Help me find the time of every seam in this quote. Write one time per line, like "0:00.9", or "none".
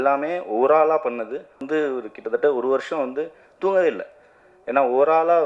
0:01.6